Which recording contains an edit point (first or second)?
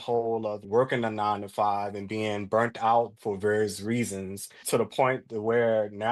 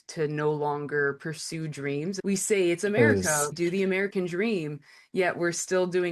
second